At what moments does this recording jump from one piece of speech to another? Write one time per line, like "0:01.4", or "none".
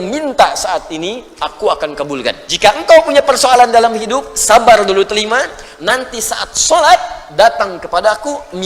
0:02.4